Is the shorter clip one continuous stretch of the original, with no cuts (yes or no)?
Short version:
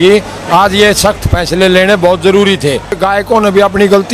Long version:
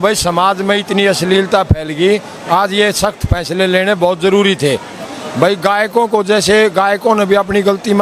no